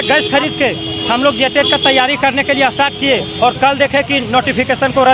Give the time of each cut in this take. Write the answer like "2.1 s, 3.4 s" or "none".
none